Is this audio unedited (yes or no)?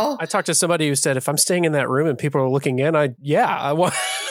no